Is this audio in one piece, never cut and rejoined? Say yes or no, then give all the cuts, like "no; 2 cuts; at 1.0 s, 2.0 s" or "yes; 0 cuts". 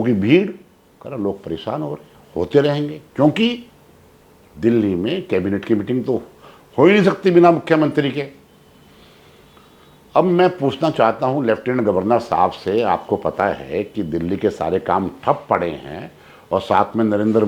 yes; 0 cuts